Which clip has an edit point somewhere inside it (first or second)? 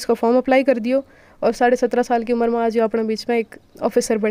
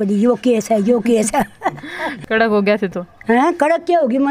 second